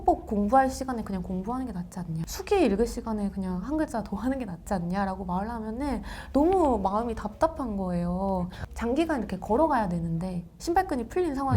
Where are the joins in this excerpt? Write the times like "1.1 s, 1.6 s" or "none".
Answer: 2.2 s, 8.6 s